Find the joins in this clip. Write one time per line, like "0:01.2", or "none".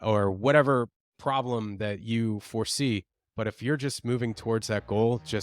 none